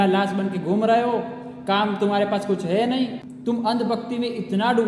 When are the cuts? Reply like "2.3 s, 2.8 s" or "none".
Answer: 3.3 s